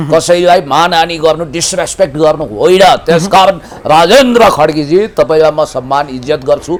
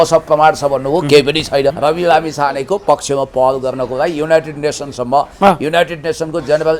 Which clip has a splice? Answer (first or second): second